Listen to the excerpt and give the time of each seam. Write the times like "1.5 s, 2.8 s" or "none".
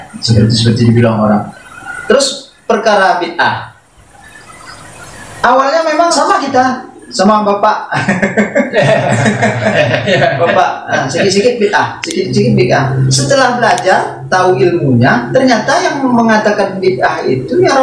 6.1 s